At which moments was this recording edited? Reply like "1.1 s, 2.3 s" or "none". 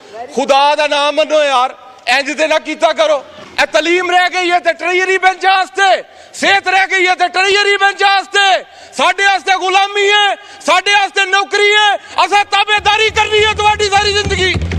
3.4 s

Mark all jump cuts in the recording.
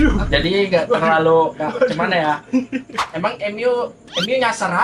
3.0 s

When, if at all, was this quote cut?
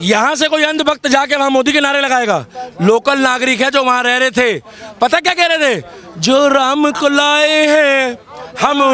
none

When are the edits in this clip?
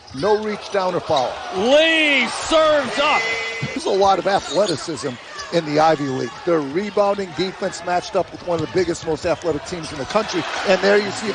none

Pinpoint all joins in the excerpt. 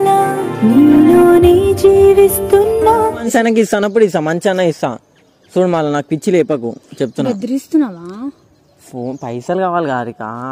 3.2 s

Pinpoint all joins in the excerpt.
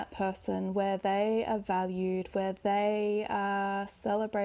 none

